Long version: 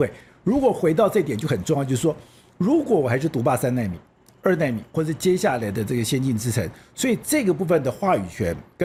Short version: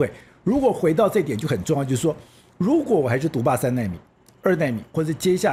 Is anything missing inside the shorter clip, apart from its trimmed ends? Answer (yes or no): no